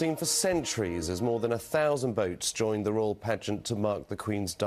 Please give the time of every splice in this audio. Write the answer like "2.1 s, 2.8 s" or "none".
none